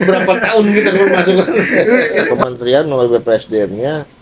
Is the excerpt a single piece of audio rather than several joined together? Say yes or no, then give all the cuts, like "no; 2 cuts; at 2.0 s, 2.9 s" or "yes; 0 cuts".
no; 1 cut; at 2.4 s